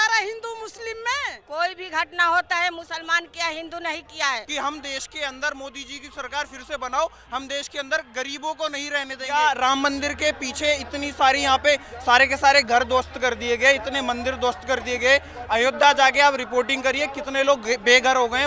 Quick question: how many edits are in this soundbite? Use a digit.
3